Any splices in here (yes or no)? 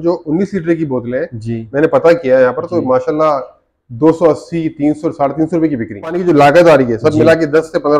yes